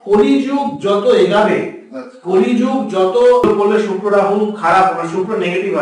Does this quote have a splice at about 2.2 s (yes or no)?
no